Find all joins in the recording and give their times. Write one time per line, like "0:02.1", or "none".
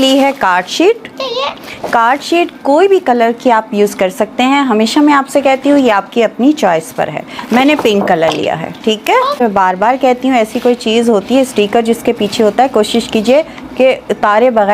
0:09.4